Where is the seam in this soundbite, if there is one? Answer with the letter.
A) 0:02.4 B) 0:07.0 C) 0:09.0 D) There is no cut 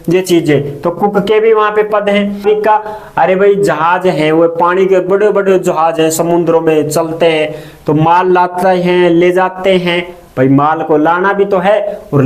A